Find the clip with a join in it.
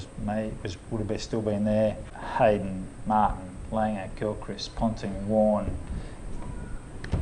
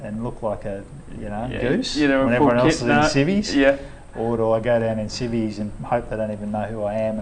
first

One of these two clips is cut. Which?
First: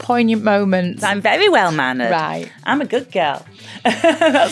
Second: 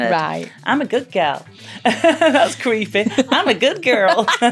first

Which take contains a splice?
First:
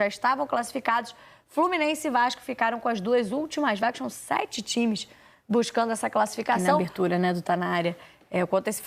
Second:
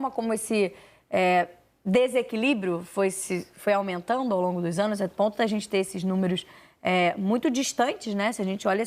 first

